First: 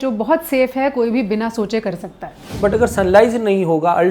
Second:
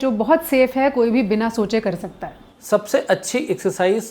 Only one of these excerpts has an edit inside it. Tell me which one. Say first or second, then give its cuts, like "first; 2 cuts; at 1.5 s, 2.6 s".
first; 1 cut; at 2.4 s